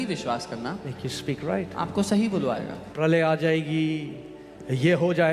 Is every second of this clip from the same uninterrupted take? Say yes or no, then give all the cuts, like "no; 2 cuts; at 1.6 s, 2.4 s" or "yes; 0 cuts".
no; 1 cut; at 2.8 s